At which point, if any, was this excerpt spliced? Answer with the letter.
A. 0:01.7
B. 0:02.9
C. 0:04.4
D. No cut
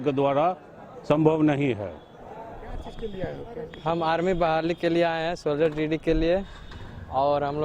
B